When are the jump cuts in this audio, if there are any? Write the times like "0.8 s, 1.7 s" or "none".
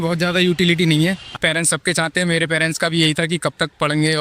1.3 s